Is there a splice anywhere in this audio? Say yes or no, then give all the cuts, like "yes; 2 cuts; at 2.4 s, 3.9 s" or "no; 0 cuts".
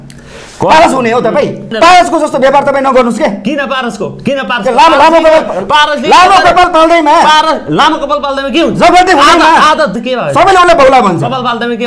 yes; 2 cuts; at 1.7 s, 9.9 s